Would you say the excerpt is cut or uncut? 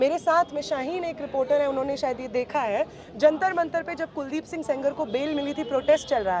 uncut